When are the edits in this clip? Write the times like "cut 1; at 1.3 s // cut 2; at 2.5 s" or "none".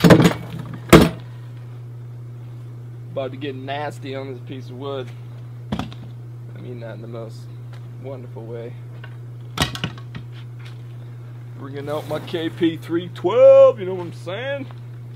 none